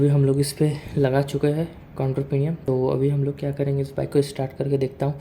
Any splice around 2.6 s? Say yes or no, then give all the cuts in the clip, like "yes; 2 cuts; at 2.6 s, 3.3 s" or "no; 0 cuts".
yes; 1 cut; at 2.6 s